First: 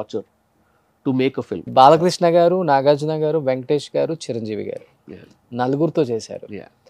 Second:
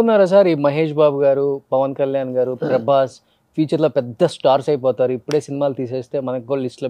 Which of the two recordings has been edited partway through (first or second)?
first